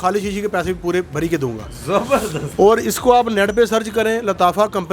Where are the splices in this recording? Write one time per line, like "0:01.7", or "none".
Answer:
none